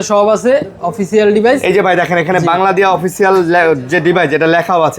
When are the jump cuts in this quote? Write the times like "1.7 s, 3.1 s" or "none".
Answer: none